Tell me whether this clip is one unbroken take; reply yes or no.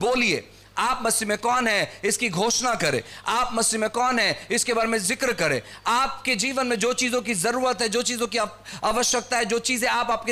yes